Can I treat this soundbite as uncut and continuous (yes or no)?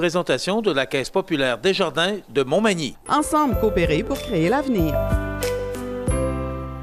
yes